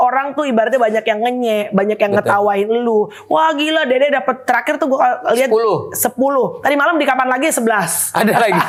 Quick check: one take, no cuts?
yes; 0 cuts

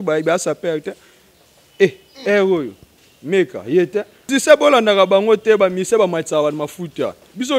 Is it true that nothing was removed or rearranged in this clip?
no; 1 cut; at 4.3 s

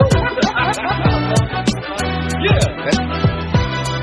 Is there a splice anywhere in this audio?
yes; 1 cut; at 1.0 s

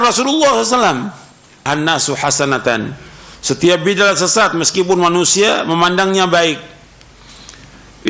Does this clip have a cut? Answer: yes; 1 cut; at 1.7 s

